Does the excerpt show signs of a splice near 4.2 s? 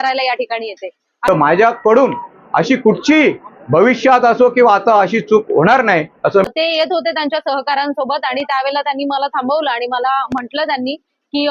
no; 2 cuts; at 1.1 s, 6.5 s

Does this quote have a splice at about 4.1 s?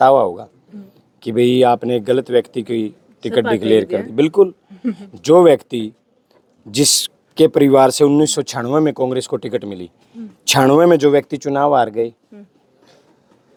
no; 0 cuts

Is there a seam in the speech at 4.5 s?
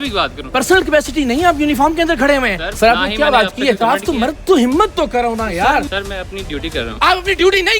no; 2 cuts; at 2.6 s, 5.9 s

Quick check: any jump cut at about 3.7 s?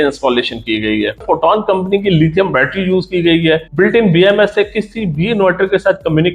yes; 2 cuts; at 1.2 s, 3.7 s

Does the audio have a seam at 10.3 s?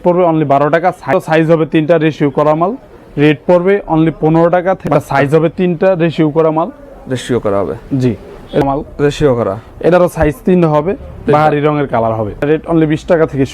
no; 4 cuts; at 1.1 s, 4.8 s, 8.6 s, 12.5 s

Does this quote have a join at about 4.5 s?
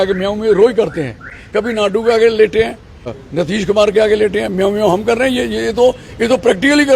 no; 2 cuts; at 1.4 s, 3.1 s

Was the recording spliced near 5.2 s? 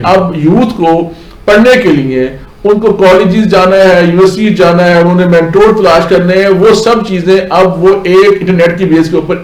no; 0 cuts

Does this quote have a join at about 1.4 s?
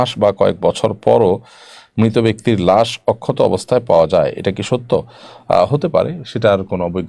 no; 0 cuts

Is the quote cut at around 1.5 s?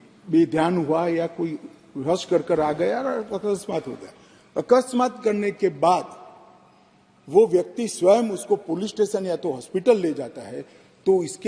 no; 0 cuts

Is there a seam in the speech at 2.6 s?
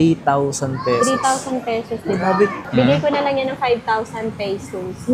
yes; 1 cut; at 2.6 s

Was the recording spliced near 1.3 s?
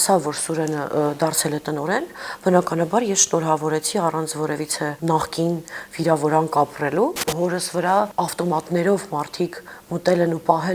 no; 3 cuts; at 5.0 s, 7.3 s, 8.1 s

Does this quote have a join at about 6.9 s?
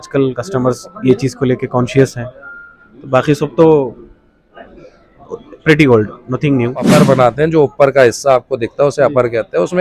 yes; 1 cut; at 6.9 s

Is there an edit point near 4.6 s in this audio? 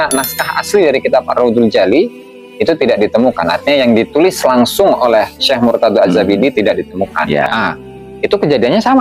no; 1 cut; at 7.5 s

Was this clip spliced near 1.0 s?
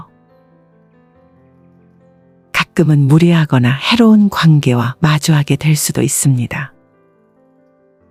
no; 0 cuts

